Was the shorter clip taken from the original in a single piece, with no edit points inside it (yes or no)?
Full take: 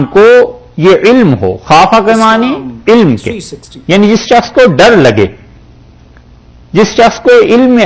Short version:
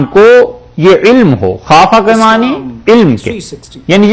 yes